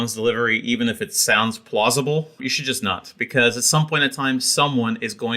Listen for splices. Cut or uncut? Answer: cut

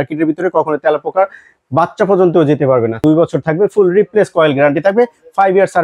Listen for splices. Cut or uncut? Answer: cut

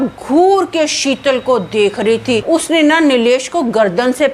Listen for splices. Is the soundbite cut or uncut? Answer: cut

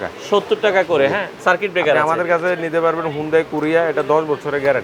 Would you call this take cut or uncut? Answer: cut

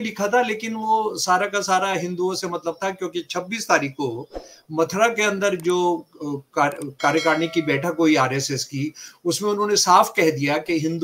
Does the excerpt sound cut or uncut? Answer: uncut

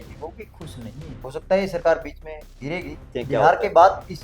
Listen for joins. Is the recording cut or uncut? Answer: cut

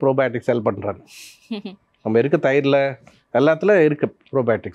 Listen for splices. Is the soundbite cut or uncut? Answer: uncut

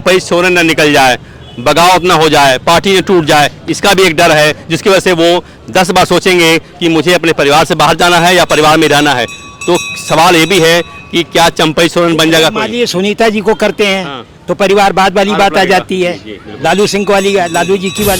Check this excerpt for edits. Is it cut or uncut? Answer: uncut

